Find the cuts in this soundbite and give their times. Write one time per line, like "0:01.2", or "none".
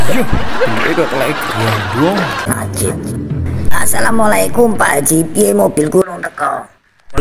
0:02.5